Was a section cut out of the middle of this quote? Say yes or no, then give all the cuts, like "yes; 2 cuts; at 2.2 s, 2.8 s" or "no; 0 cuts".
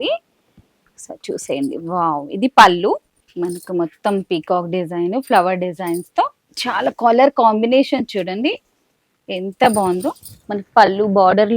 no; 0 cuts